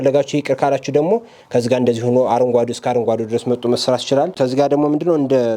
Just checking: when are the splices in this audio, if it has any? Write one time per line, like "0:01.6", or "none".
0:04.3